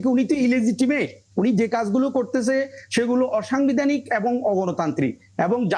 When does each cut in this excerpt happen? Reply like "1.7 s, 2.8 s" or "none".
none